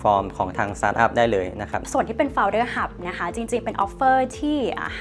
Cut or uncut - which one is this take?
cut